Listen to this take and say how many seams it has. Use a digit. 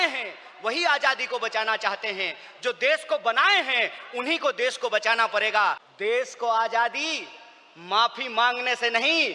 1